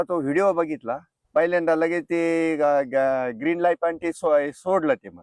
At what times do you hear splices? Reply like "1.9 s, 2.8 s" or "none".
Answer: 1.2 s